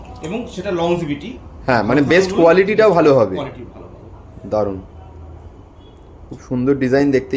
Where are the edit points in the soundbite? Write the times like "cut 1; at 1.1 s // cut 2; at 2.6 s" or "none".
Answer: none